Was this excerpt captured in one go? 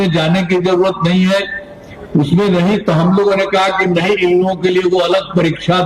yes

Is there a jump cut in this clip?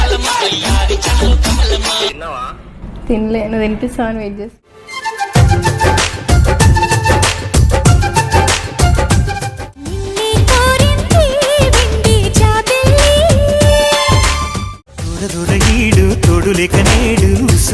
no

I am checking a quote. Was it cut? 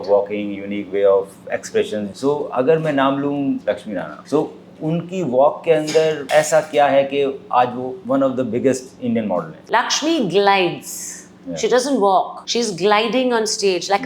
yes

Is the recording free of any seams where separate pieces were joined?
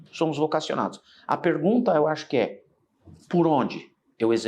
yes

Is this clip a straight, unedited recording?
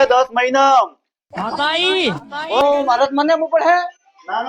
no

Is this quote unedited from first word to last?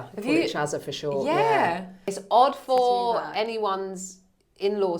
no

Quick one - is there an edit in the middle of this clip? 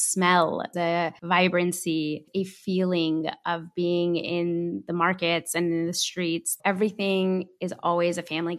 yes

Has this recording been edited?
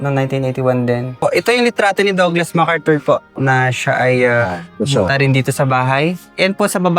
yes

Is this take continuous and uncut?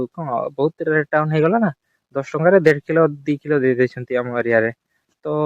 yes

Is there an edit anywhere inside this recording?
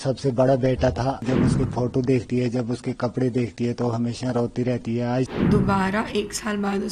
yes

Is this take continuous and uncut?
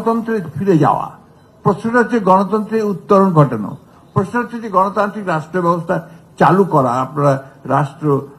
yes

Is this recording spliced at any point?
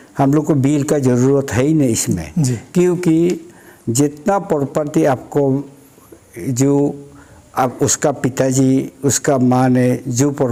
no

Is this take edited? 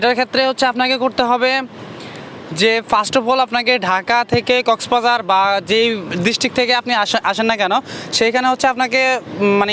no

